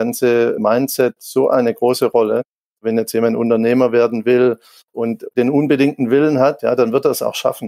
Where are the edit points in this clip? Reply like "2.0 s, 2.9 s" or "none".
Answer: 2.9 s, 5.2 s